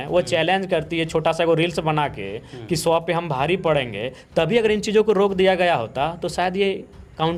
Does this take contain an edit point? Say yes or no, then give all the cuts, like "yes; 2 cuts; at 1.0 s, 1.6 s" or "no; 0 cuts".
no; 0 cuts